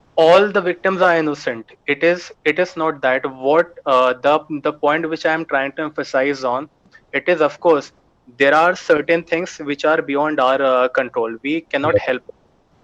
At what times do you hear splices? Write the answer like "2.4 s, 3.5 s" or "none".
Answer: none